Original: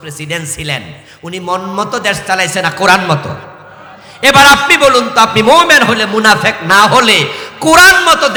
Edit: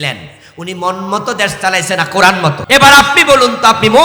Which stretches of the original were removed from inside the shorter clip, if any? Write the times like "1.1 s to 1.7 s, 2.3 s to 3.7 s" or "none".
3.3 s to 4.1 s